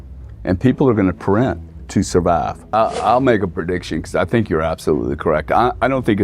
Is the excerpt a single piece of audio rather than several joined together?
no; 1 cut; at 2.6 s

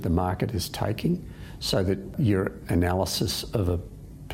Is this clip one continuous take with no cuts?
no; 1 cut; at 2.1 s

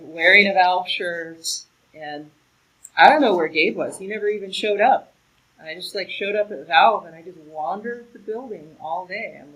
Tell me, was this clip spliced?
no; 0 cuts

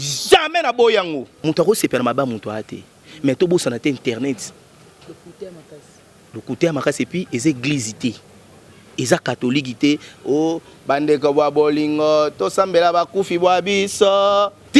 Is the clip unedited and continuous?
no; 1 cut; at 1.3 s

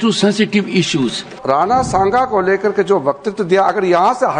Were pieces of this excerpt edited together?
yes; 1 cut; at 1.3 s

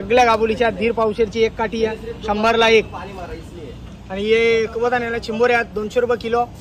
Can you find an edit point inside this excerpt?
no; 0 cuts

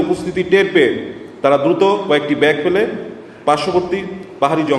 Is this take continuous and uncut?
yes; 0 cuts

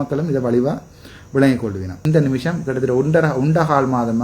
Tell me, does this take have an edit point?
yes; 1 cut; at 2.0 s

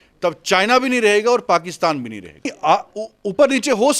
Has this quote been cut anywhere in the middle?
yes; 1 cut; at 2.5 s

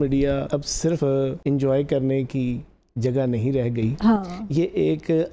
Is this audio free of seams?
no; 1 cut; at 1.0 s

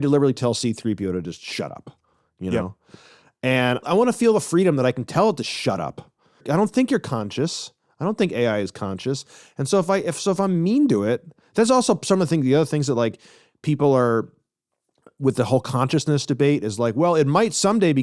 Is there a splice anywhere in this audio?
yes; 2 cuts; at 3.8 s, 6.4 s

